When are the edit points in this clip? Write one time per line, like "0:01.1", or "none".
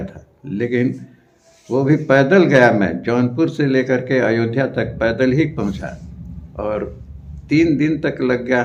none